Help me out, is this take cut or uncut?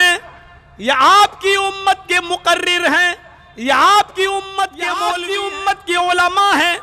cut